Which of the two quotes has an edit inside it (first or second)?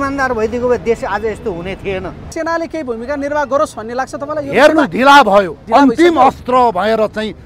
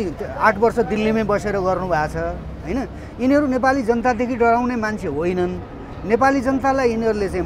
first